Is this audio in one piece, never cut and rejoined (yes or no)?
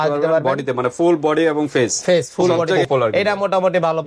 no